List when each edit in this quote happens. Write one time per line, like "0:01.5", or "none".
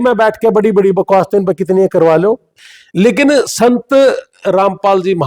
0:02.5